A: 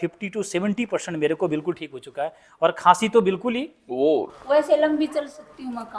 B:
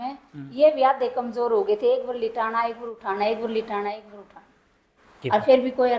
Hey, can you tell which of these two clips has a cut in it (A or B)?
A